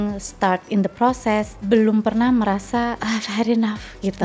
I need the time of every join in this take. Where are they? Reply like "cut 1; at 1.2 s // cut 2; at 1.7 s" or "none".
cut 1; at 1.6 s // cut 2; at 3.0 s